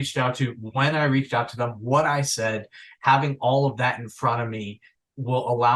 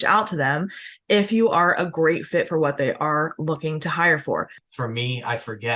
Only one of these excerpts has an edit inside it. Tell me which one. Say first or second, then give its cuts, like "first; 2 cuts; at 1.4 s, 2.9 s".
second; 1 cut; at 4.6 s